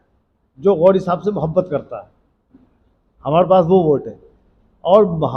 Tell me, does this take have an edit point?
no; 0 cuts

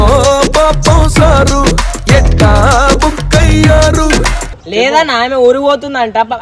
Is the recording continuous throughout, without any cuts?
no; 1 cut; at 4.5 s

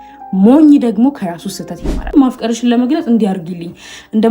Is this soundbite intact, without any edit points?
no; 1 cut; at 2.1 s

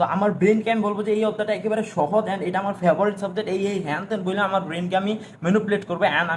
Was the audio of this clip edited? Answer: no; 0 cuts

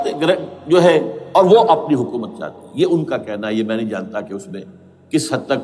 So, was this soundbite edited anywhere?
no; 0 cuts

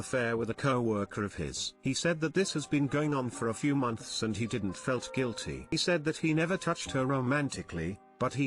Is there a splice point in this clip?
yes; 1 cut; at 5.7 s

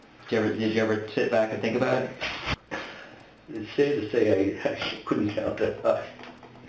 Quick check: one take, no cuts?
no; 1 cut; at 2.5 s

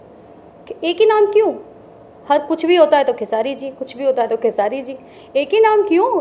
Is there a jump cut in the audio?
no; 0 cuts

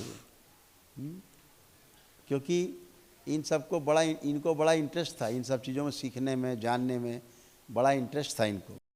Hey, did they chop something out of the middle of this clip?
no; 0 cuts

